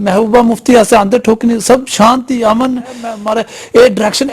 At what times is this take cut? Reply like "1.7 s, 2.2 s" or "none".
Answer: 3.1 s

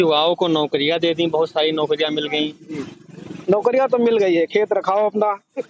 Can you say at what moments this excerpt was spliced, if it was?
none

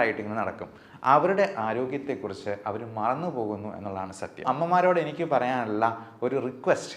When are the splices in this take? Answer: 4.4 s

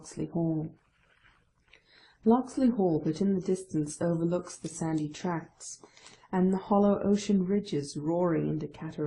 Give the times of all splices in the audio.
3.8 s

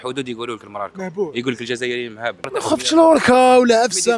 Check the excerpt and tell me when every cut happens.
2.5 s

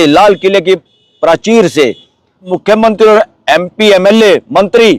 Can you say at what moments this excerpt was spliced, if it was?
2.5 s

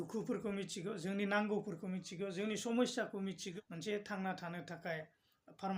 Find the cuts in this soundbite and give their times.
3.5 s

